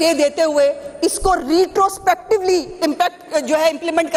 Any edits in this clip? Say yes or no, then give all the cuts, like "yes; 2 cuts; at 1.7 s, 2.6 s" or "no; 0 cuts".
no; 0 cuts